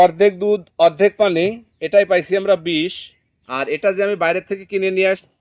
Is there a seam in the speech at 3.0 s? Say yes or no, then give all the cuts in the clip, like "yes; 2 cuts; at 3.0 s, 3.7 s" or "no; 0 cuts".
no; 0 cuts